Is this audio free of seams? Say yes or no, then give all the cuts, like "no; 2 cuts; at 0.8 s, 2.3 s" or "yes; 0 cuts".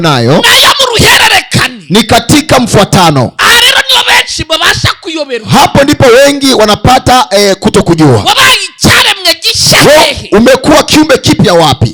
yes; 0 cuts